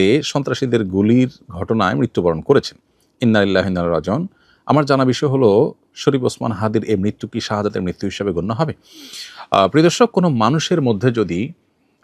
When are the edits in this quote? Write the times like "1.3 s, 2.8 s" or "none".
none